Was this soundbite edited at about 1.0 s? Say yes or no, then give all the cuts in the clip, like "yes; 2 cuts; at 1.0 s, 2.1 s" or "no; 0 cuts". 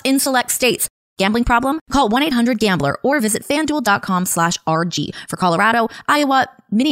yes; 1 cut; at 1.0 s